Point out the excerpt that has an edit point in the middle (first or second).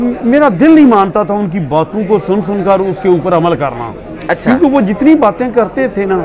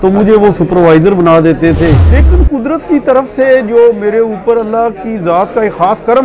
second